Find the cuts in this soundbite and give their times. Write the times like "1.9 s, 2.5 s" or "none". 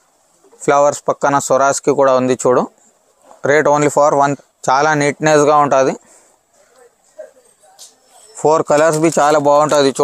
4.3 s